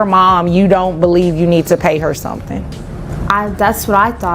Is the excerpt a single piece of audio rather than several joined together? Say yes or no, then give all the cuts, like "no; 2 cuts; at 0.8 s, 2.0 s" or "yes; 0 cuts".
no; 1 cut; at 3.1 s